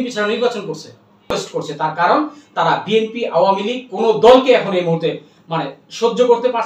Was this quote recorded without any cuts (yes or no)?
no